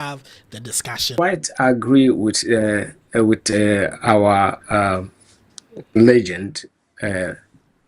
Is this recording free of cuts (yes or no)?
no